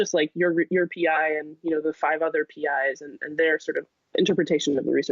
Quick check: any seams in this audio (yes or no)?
yes